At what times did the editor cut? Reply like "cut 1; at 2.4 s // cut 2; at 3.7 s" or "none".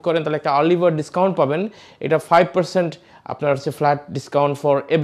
none